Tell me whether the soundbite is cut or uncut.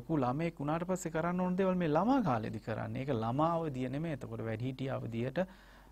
uncut